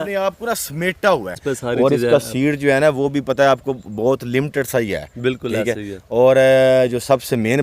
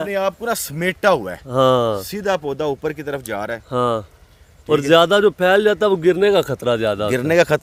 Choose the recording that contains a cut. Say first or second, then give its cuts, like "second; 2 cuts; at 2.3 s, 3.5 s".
first; 1 cut; at 1.4 s